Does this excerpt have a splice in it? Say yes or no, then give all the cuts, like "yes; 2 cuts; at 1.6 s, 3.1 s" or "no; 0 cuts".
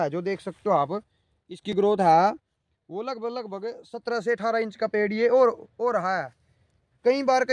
no; 0 cuts